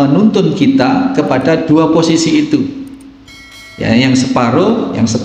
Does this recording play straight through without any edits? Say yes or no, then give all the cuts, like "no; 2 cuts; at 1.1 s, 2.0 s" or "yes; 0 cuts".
no; 1 cut; at 1.6 s